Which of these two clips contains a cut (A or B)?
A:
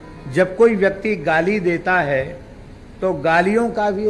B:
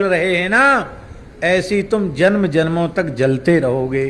B